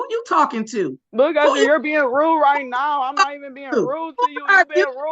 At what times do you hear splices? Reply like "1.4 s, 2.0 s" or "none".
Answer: 1.0 s